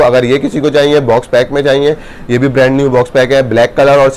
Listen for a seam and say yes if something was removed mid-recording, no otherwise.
no